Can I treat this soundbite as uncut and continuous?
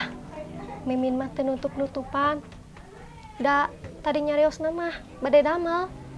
yes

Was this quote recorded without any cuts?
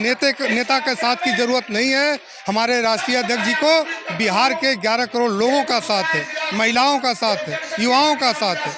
yes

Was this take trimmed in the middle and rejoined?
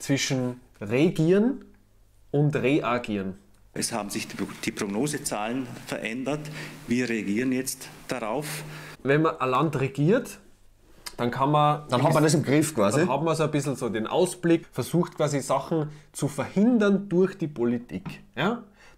no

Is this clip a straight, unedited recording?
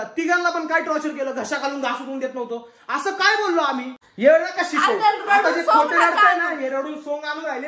no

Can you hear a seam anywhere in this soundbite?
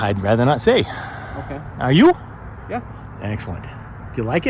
no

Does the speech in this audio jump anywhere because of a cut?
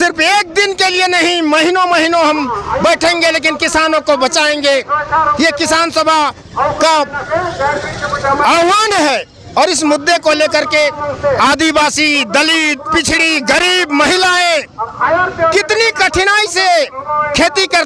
no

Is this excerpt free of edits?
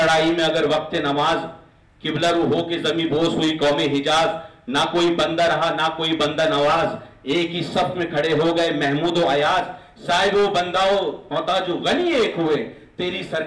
yes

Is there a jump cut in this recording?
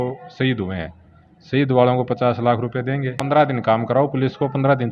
yes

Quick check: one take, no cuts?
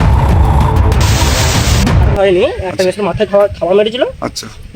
yes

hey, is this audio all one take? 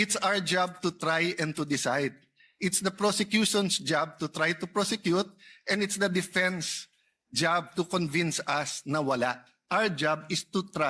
yes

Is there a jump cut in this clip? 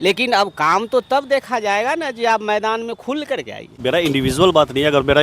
yes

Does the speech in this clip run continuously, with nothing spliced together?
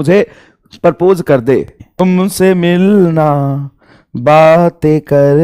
no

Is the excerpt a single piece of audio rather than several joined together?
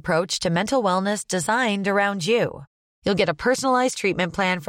yes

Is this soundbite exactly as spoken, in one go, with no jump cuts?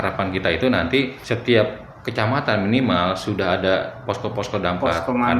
no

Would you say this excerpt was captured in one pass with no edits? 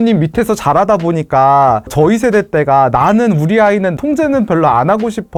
yes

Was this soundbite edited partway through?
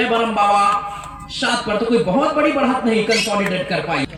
no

